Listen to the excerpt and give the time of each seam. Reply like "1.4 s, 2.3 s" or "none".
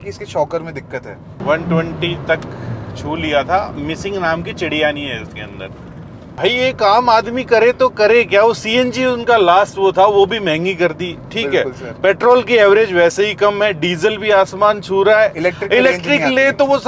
1.4 s, 6.2 s